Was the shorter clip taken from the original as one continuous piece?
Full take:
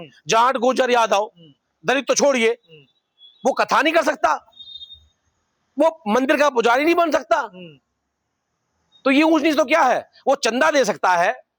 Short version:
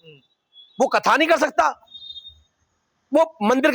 yes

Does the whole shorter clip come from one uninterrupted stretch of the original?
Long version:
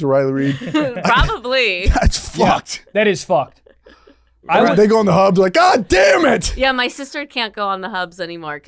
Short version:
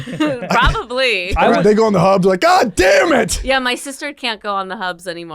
no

